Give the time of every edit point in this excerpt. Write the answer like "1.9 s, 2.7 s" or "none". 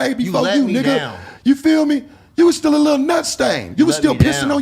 none